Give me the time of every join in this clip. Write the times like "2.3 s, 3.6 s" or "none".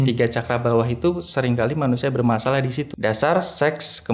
2.9 s